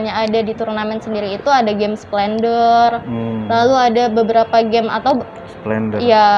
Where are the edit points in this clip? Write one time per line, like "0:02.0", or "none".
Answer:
none